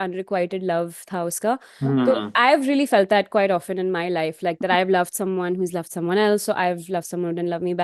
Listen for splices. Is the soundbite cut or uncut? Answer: uncut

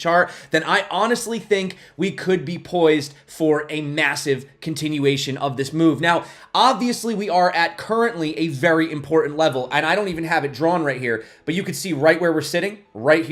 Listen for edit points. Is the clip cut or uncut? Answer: uncut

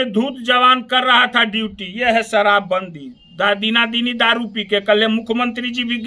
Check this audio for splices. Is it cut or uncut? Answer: uncut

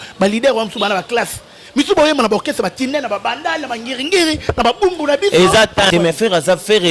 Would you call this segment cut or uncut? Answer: cut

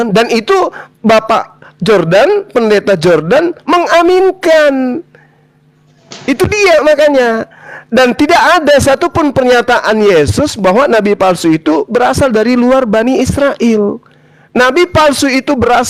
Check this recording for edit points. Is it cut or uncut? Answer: uncut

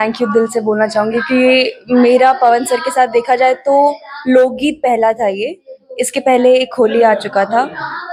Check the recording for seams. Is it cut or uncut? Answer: uncut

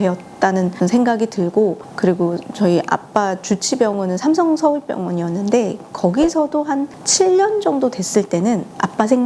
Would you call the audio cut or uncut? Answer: uncut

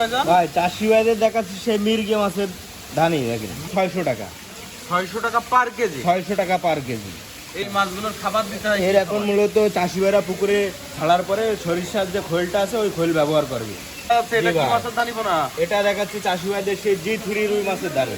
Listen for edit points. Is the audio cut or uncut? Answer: cut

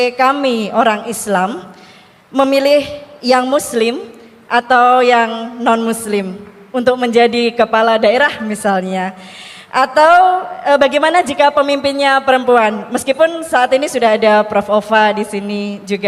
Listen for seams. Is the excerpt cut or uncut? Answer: uncut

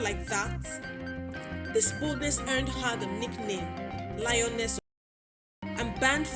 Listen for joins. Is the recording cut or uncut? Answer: cut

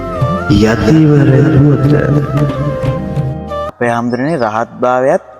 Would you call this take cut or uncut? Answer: cut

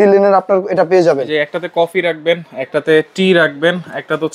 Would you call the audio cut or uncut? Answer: uncut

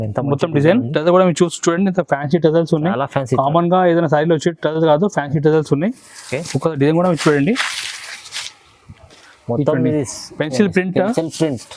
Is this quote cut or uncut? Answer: uncut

